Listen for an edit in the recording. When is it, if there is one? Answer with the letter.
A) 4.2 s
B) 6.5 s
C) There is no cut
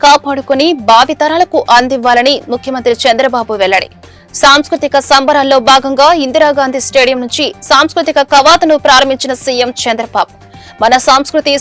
C